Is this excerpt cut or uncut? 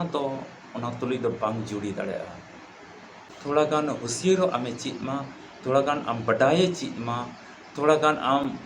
cut